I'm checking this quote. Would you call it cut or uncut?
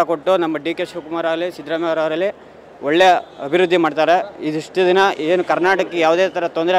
uncut